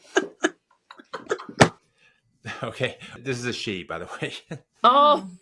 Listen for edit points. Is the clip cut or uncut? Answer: cut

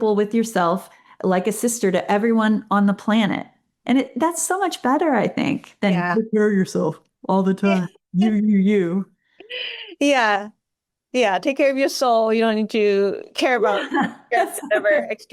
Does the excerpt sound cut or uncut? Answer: uncut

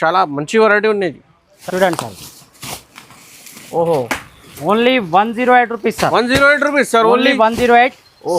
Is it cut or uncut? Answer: cut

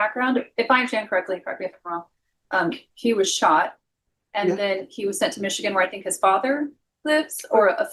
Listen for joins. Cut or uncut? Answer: uncut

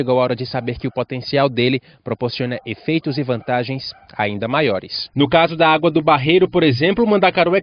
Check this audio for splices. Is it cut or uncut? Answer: cut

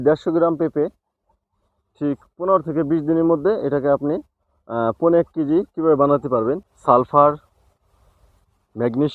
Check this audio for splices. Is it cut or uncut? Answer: cut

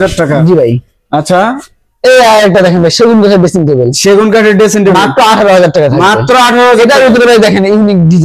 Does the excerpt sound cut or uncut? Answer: uncut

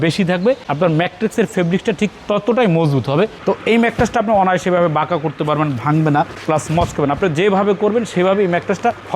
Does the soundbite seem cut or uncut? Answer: cut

